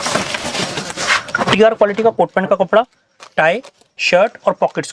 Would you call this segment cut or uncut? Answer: uncut